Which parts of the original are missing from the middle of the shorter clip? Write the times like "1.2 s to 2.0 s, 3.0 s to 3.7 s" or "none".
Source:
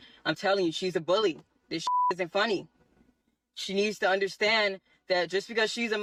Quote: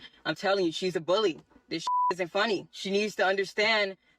2.7 s to 3.6 s